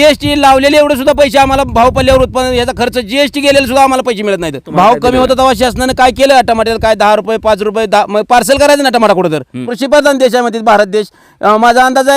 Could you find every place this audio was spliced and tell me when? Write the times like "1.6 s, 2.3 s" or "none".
4.6 s, 9.7 s